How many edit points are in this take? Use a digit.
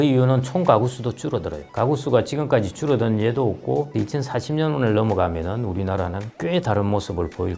1